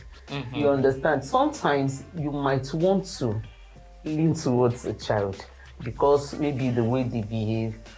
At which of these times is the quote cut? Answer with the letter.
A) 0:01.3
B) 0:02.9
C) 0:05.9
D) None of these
D